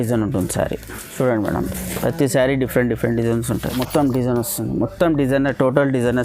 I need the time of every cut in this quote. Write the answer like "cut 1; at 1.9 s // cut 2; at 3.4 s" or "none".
cut 1; at 1.0 s // cut 2; at 3.7 s